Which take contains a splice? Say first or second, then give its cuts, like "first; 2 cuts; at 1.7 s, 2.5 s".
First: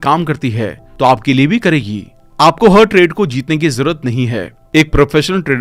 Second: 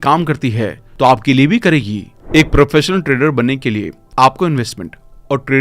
second; 1 cut; at 2.1 s